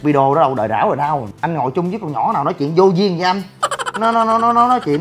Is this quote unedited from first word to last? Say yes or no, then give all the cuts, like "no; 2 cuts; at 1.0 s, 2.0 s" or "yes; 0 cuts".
no; 1 cut; at 1.3 s